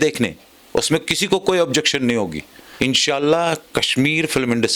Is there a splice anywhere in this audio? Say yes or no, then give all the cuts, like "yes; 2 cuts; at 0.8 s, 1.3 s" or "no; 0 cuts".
yes; 1 cut; at 2.6 s